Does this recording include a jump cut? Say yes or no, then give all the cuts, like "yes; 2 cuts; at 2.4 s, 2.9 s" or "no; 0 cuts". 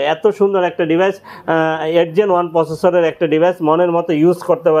no; 0 cuts